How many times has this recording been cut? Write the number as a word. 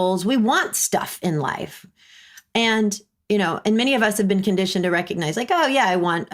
zero